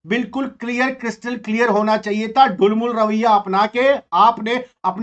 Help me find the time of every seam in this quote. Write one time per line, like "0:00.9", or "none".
none